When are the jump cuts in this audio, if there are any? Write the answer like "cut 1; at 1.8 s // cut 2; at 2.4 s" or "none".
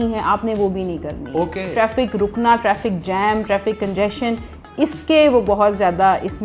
cut 1; at 1.7 s